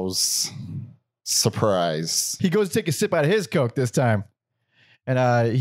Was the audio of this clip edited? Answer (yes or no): yes